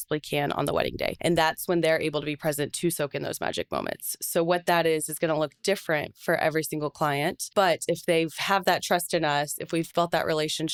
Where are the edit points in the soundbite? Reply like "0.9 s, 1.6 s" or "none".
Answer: none